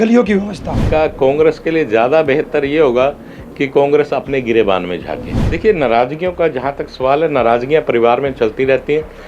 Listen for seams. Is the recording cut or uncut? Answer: cut